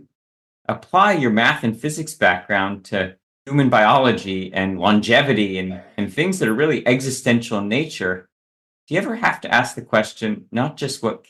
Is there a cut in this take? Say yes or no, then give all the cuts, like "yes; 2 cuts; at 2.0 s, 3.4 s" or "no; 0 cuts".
no; 0 cuts